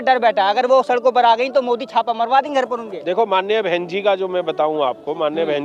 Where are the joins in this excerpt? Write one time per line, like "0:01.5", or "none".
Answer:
none